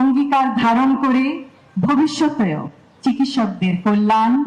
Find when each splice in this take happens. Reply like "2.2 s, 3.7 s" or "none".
none